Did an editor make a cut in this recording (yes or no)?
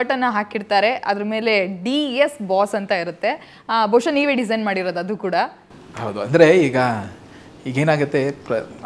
no